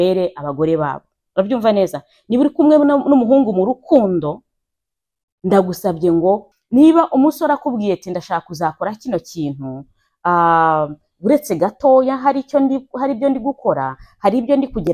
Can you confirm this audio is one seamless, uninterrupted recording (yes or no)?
no